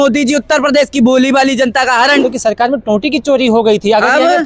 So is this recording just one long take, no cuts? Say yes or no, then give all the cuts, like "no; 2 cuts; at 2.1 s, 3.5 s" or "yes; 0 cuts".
no; 1 cut; at 2.2 s